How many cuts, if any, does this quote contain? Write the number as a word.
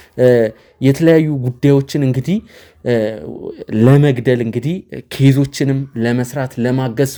zero